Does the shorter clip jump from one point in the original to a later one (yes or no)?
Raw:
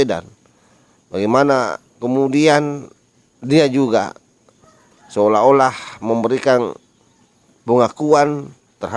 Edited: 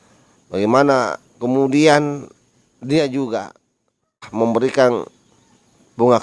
yes